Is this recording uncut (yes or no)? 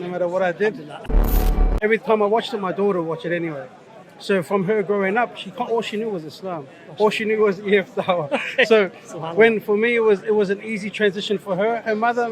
no